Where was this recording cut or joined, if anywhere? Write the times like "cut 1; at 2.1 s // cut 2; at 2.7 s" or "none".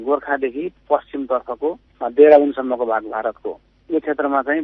none